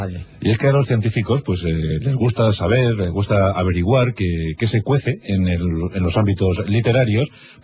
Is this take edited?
yes; 1 cut; at 2.0 s

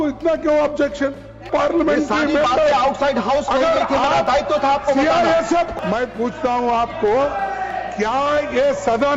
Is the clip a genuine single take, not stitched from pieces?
no; 2 cuts; at 1.5 s, 5.7 s

